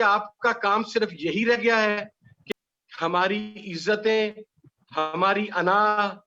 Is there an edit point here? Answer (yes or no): yes